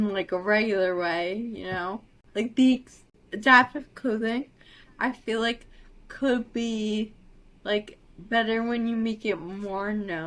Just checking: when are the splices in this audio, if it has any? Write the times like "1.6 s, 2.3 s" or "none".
none